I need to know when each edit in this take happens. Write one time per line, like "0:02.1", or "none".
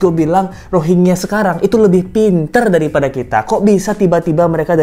none